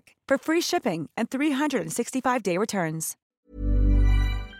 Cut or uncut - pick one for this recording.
cut